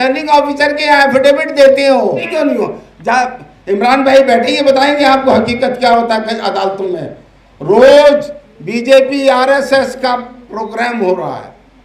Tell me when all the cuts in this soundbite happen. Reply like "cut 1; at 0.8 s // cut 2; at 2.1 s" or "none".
cut 1; at 2.3 s